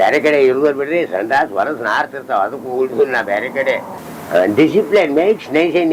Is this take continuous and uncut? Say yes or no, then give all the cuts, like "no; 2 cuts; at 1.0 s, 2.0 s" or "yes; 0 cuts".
no; 1 cut; at 3.9 s